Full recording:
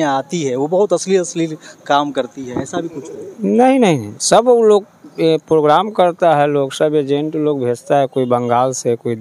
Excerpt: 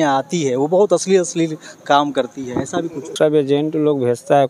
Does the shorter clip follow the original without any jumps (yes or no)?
no